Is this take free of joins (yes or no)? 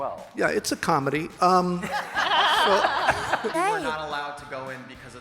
no